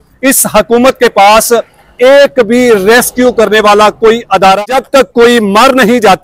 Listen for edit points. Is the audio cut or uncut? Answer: cut